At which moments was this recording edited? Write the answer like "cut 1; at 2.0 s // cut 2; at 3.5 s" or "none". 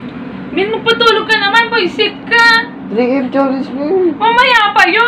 cut 1; at 2.7 s